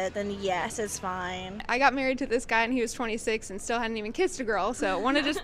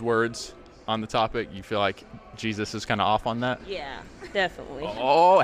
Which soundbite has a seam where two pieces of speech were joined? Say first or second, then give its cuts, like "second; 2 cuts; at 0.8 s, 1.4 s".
first; 1 cut; at 1.7 s